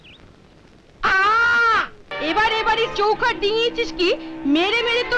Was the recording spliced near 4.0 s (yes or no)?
no